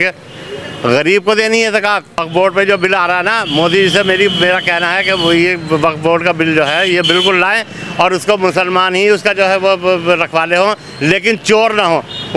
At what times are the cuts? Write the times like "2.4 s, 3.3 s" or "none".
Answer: 2.2 s